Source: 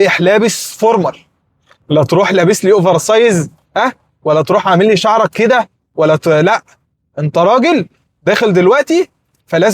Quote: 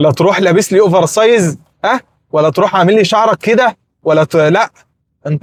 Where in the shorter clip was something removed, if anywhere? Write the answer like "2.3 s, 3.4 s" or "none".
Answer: none